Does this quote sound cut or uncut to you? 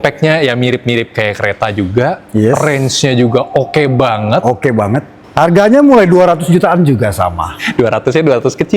cut